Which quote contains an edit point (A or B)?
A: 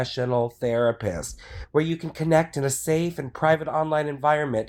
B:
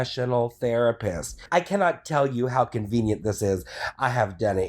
B